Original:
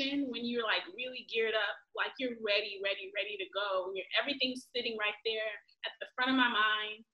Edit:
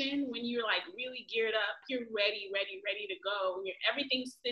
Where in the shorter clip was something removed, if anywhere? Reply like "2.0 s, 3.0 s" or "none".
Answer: 1.8 s